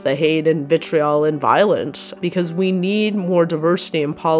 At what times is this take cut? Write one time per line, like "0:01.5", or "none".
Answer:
0:02.1